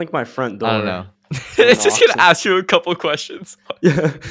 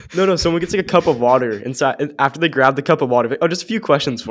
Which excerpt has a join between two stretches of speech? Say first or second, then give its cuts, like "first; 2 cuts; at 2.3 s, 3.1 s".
first; 1 cut; at 1.6 s